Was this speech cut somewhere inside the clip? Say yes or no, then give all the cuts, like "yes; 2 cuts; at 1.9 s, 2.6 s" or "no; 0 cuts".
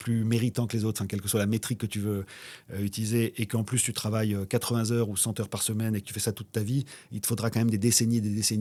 no; 0 cuts